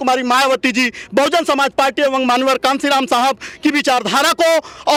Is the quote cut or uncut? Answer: uncut